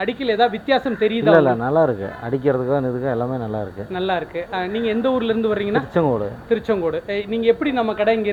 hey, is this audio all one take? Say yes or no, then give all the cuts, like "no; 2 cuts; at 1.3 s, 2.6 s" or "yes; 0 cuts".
yes; 0 cuts